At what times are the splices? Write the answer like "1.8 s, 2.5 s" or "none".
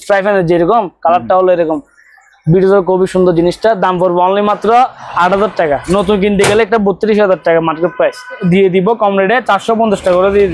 8.4 s